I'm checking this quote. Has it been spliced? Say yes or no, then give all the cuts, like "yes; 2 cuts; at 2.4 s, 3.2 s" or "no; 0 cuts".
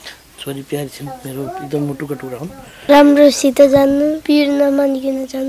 yes; 2 cuts; at 2.9 s, 4.2 s